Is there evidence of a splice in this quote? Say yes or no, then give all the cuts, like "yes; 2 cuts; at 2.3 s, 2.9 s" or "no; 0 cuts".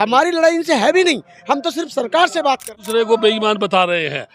yes; 1 cut; at 2.7 s